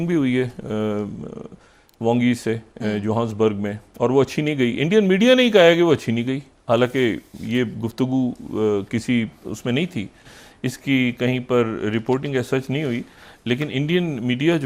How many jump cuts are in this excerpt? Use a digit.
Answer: 0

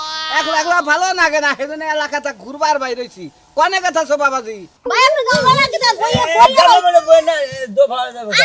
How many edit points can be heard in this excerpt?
1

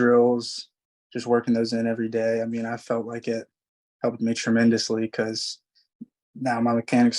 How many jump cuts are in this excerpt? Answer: 0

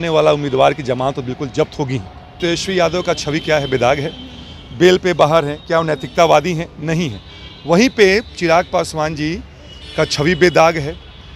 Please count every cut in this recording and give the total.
1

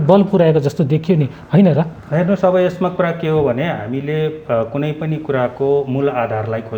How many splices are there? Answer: 0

